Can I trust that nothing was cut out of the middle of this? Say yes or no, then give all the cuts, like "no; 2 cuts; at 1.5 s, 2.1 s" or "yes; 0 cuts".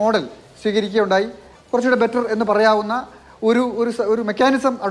no; 1 cut; at 1.4 s